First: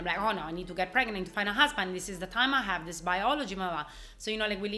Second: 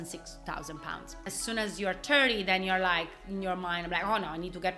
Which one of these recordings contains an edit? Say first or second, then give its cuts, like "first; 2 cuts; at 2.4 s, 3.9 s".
second; 1 cut; at 1.4 s